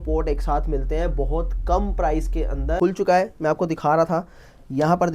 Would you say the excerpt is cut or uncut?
cut